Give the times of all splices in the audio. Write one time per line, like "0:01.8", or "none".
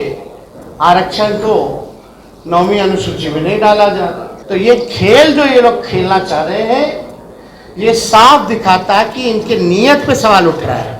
0:04.3